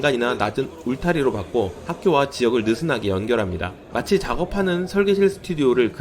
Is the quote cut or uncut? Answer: cut